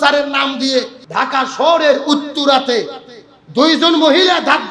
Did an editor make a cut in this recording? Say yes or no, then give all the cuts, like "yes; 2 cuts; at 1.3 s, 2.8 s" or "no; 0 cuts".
yes; 1 cut; at 1.0 s